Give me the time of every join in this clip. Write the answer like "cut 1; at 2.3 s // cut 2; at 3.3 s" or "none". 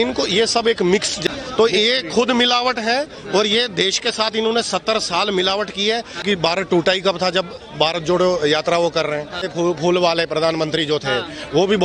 cut 1; at 1.2 s // cut 2; at 6.2 s // cut 3; at 9.4 s